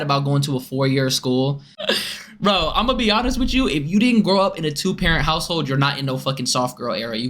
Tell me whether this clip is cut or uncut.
cut